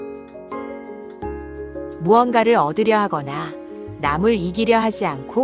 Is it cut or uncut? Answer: cut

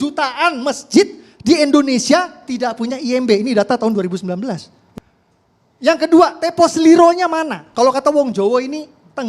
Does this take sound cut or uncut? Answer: cut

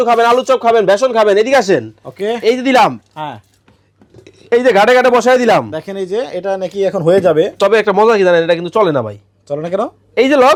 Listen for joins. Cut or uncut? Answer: uncut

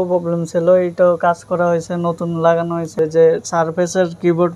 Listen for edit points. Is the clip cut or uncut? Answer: cut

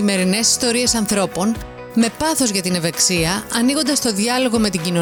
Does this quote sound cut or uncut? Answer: uncut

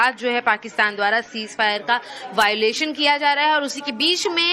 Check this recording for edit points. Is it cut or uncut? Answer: cut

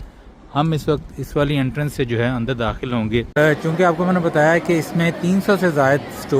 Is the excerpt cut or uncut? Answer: cut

